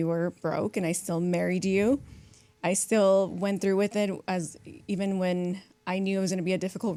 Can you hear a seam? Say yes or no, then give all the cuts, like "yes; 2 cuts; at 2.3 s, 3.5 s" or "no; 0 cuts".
no; 0 cuts